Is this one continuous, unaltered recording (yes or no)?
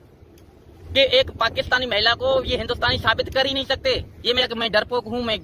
no